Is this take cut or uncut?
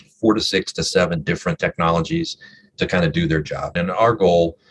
cut